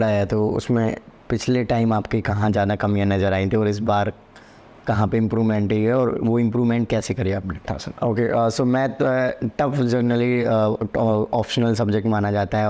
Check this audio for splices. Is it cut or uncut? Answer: cut